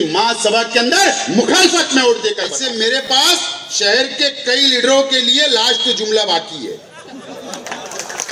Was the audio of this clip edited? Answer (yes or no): yes